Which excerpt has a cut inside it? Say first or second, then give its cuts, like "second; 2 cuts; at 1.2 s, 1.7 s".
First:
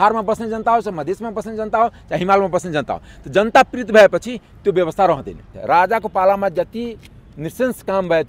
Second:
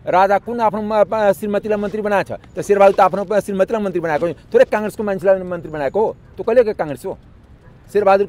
first; 1 cut; at 5.6 s